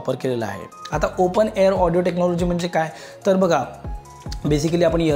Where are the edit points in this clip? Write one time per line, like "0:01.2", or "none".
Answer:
none